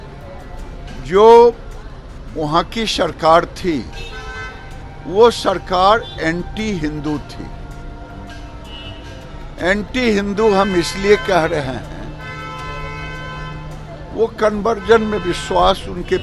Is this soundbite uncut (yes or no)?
yes